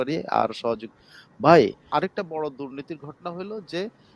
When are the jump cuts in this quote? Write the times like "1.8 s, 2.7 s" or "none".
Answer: 1.9 s